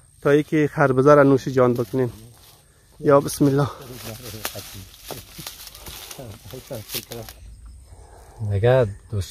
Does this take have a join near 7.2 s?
yes; 1 cut; at 7.2 s

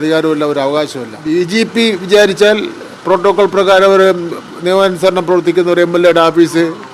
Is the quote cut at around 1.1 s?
yes; 1 cut; at 1.1 s

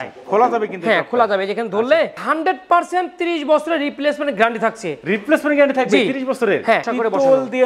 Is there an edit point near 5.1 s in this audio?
no; 2 cuts; at 2.2 s, 6.8 s

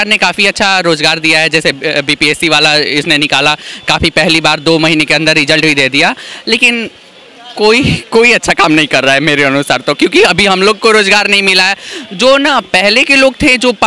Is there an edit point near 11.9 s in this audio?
no; 0 cuts

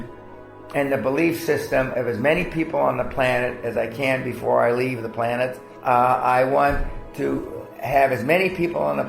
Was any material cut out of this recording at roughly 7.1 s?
no; 1 cut; at 5.7 s

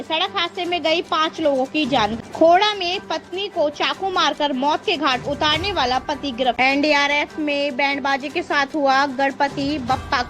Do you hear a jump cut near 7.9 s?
no; 2 cuts; at 2.1 s, 6.6 s

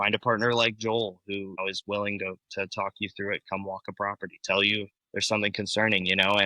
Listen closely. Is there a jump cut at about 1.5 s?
yes; 2 cuts; at 1.5 s, 5.0 s

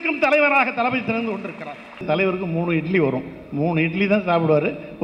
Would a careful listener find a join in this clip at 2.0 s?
yes; 1 cut; at 2.0 s

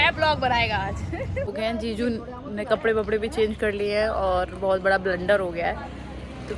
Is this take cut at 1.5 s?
yes; 1 cut; at 1.5 s

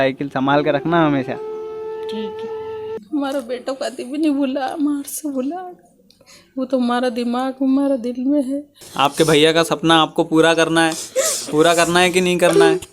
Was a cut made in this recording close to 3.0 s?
yes; 2 cuts; at 3.0 s, 8.8 s

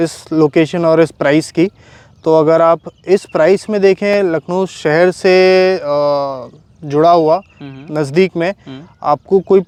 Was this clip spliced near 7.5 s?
no; 0 cuts

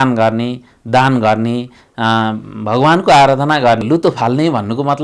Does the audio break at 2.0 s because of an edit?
no; 1 cut; at 3.8 s

